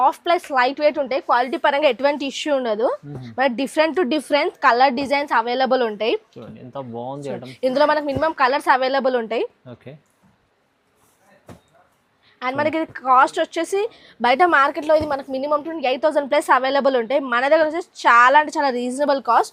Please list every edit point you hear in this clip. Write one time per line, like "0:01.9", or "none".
none

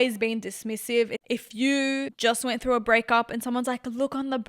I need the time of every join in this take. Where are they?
0:01.2
0:02.1

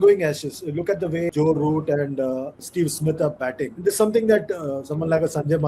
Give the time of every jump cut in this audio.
0:01.3
0:02.6
0:03.7

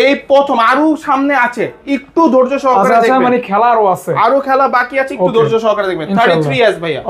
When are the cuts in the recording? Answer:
none

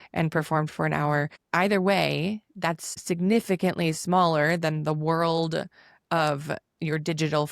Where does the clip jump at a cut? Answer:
0:01.4

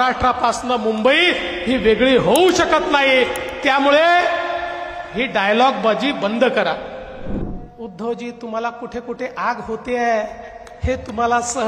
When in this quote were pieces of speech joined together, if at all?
0:07.5

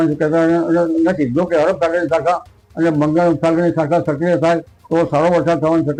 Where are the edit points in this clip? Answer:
none

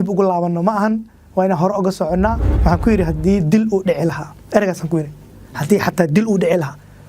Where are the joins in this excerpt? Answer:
0:02.5

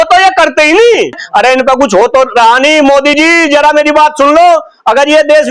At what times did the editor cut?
0:01.2

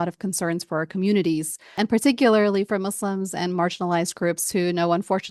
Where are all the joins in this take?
0:01.7

